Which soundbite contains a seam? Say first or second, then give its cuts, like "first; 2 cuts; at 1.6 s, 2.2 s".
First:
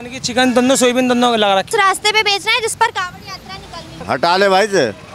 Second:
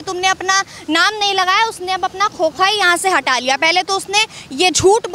first; 2 cuts; at 1.7 s, 4.0 s